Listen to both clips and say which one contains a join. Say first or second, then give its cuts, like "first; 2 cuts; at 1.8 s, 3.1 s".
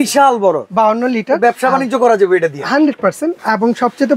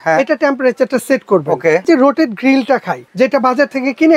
second; 2 cuts; at 1.8 s, 3.0 s